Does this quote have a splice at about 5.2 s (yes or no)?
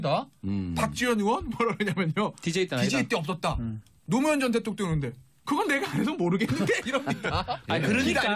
no